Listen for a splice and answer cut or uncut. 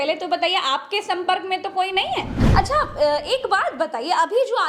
cut